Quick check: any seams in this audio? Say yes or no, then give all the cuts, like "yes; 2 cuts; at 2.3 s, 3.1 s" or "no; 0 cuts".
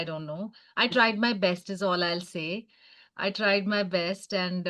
no; 0 cuts